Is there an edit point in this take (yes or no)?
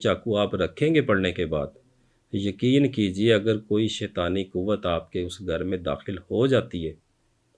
no